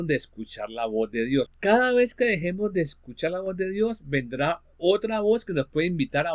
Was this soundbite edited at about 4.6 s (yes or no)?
no